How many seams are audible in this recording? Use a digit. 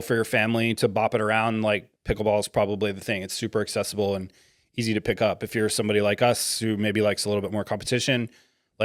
0